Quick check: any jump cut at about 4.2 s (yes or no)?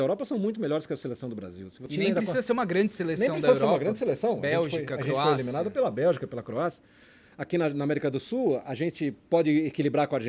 no